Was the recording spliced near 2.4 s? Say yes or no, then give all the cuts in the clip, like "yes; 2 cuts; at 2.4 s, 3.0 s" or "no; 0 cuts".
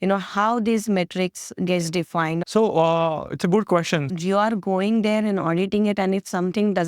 yes; 2 cuts; at 2.4 s, 4.1 s